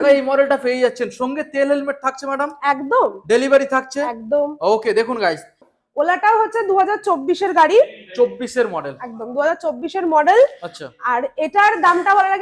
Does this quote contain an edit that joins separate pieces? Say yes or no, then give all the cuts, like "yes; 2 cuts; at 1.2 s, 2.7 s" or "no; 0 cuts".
yes; 1 cut; at 5.6 s